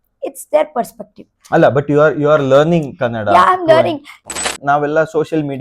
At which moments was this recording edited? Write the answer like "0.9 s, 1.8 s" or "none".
4.3 s